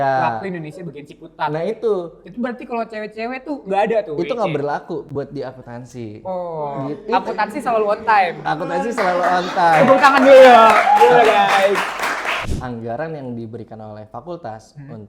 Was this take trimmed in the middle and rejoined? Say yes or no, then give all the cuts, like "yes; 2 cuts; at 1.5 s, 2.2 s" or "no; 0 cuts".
yes; 1 cut; at 12.5 s